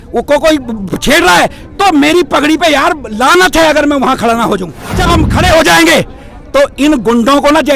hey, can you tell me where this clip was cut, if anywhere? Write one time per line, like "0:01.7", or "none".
0:05.0